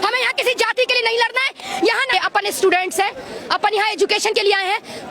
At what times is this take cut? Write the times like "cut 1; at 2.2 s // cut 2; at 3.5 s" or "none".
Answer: cut 1; at 2.1 s

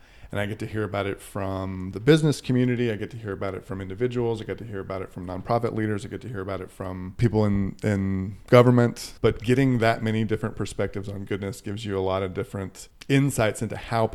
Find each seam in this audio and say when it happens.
cut 1; at 7.1 s // cut 2; at 9.1 s // cut 3; at 12.9 s

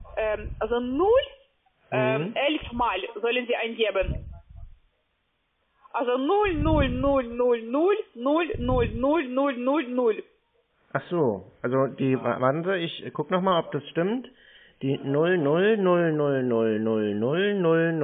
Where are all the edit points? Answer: none

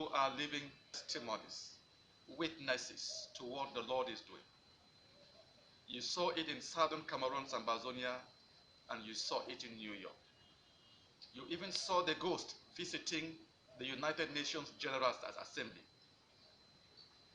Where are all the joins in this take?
cut 1; at 0.9 s

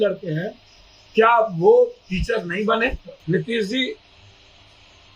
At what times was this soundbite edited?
cut 1; at 3.1 s

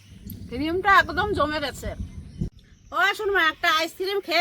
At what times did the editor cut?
cut 1; at 2.5 s

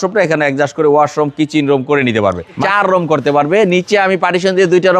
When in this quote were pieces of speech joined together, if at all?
cut 1; at 2.6 s

